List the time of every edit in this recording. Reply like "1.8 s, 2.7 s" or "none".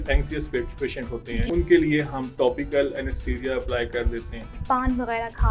1.5 s, 4.6 s